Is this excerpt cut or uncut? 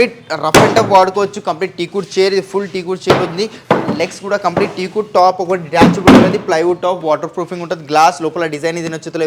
uncut